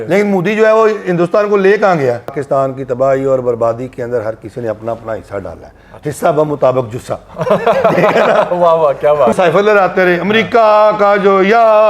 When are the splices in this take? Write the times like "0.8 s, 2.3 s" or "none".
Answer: 2.4 s, 9.3 s

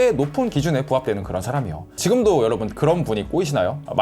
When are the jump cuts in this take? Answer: 1.9 s

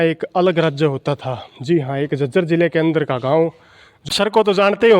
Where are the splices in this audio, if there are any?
4.1 s

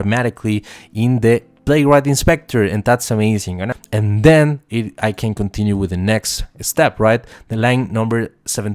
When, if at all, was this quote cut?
3.7 s

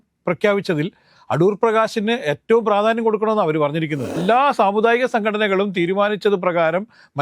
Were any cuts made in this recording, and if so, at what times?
4.2 s

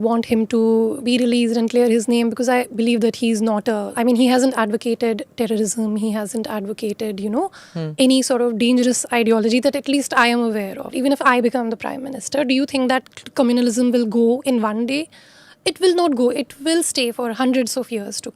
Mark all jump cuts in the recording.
1.0 s, 3.9 s, 10.9 s

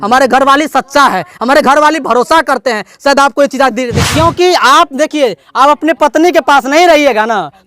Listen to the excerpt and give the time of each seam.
4.0 s

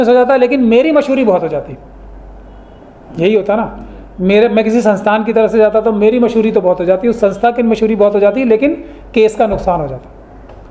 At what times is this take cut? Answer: none

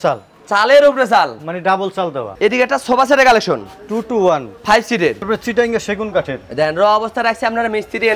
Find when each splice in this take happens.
2.3 s, 5.2 s

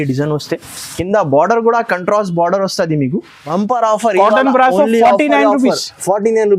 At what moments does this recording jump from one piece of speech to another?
3.4 s

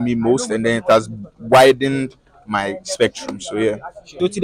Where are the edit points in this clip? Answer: none

